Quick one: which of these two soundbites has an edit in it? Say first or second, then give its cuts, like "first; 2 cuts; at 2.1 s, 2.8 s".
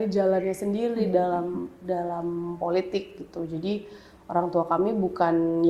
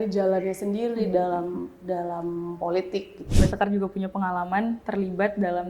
second; 1 cut; at 3.3 s